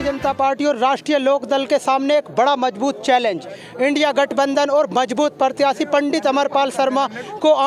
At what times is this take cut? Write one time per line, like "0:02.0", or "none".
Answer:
none